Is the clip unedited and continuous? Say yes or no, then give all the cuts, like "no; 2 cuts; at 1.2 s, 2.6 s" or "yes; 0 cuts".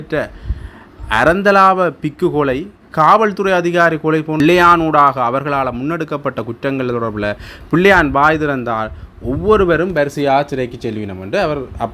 no; 1 cut; at 4.4 s